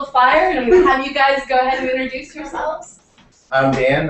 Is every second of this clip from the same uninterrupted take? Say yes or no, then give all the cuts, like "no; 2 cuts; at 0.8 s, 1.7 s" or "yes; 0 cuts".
no; 1 cut; at 2.6 s